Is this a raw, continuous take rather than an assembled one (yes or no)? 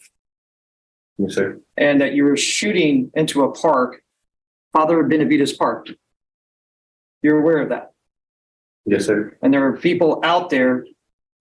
yes